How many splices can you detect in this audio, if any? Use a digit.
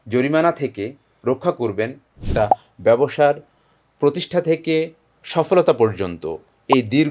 1